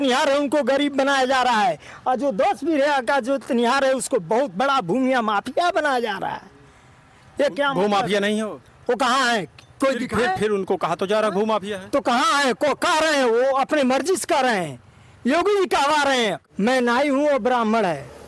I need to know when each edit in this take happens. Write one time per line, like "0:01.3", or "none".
0:16.4